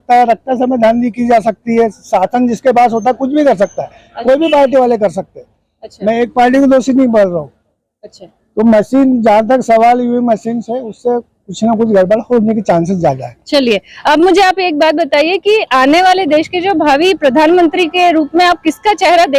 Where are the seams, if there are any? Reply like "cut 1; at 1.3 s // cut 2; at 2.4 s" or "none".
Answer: none